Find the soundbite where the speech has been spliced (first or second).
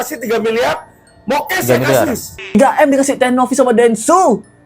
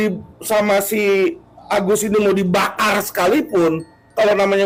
first